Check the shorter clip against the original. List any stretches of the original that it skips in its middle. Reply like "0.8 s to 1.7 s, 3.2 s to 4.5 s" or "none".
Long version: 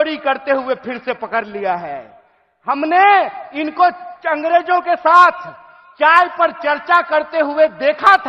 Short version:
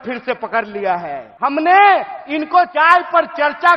2.0 s to 2.5 s, 4.0 s to 6.0 s